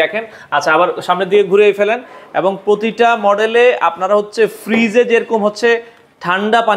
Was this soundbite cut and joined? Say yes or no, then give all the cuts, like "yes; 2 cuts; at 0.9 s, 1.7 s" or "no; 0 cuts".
no; 0 cuts